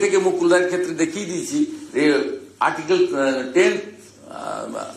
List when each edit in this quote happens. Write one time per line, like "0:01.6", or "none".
none